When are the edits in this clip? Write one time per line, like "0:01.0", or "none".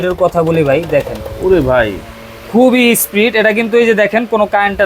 none